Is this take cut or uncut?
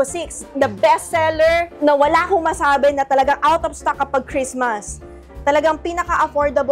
uncut